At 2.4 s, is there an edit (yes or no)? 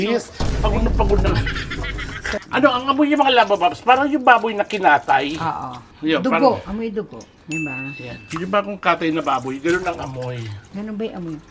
yes